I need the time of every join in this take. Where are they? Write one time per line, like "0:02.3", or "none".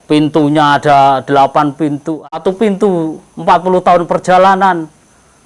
0:02.3